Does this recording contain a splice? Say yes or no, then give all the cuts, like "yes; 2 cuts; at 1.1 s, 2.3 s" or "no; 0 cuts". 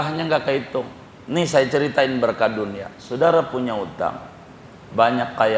no; 0 cuts